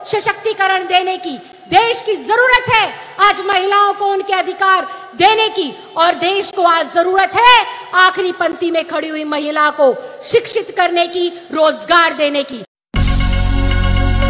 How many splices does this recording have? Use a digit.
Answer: 1